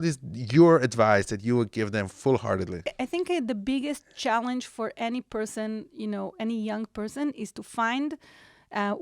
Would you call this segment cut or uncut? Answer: cut